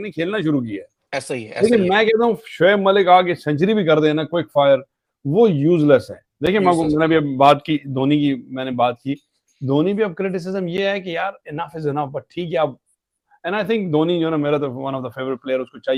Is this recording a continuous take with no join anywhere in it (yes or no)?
yes